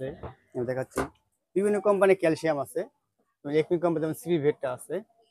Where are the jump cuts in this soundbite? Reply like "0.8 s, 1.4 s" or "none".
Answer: none